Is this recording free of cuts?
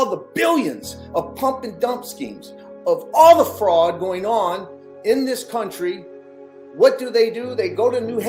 yes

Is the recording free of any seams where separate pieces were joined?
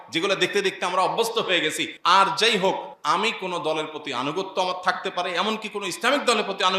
no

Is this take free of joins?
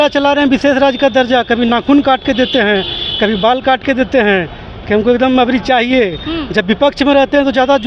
yes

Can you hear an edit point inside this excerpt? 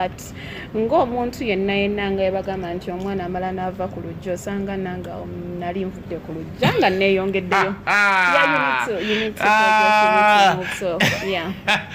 no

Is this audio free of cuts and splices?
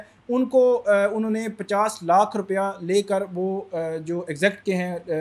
yes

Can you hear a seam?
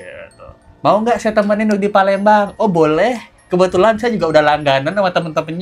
no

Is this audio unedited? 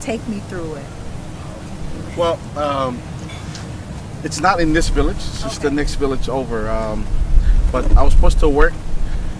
yes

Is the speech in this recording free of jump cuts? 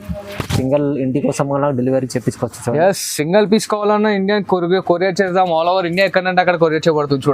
yes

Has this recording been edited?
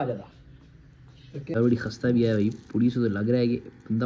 yes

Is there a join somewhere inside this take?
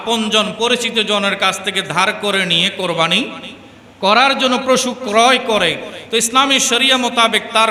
no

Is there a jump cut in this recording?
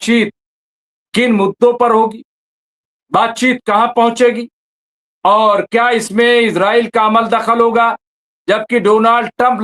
no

